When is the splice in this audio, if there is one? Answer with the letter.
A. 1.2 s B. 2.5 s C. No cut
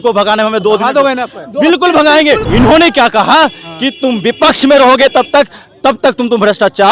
B